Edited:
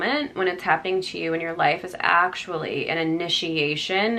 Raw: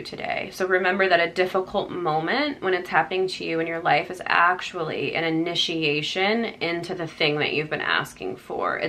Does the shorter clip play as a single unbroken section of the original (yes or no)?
yes